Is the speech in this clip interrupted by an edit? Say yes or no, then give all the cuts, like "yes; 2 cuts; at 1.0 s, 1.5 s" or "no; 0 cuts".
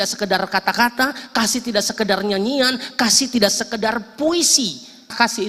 no; 0 cuts